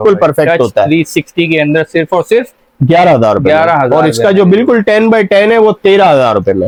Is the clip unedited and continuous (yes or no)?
yes